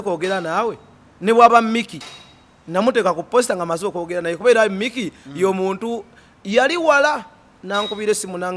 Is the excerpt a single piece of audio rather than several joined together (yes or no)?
yes